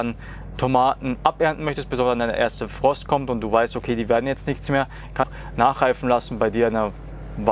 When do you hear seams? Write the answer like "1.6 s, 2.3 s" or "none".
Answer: 5.3 s